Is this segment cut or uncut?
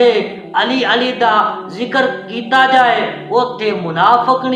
uncut